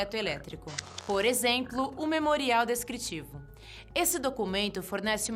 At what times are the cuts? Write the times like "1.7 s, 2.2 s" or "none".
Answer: none

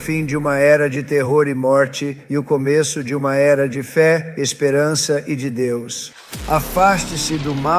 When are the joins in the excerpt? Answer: 6.3 s

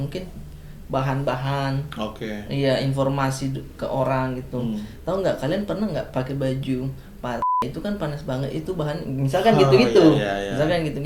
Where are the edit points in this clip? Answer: none

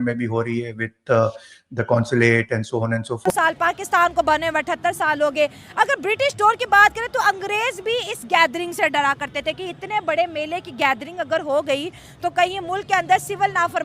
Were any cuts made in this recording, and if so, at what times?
3.3 s

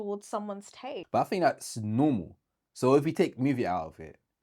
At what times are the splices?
1.0 s

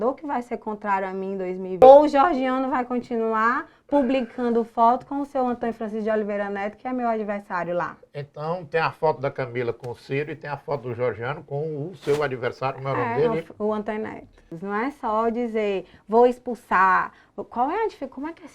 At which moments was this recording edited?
1.8 s, 14.5 s

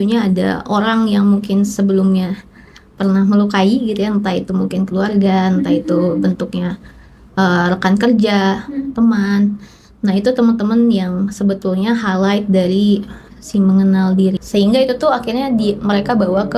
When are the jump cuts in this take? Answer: 14.4 s

